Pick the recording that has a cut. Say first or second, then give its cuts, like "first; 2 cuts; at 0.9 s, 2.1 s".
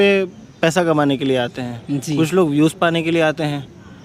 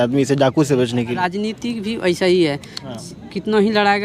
second; 1 cut; at 1.2 s